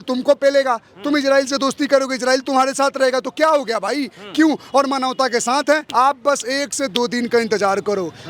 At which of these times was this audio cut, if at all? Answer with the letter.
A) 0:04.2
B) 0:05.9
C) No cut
B